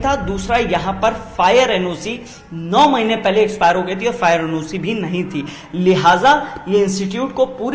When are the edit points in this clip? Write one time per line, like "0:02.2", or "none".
none